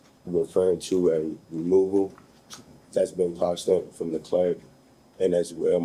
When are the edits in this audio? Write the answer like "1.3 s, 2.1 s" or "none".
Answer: none